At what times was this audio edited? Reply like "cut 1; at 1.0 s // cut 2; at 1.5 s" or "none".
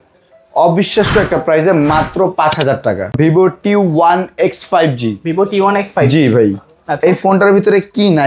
cut 1; at 3.2 s